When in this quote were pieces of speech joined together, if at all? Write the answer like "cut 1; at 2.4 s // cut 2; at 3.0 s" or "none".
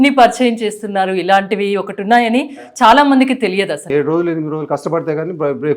cut 1; at 3.8 s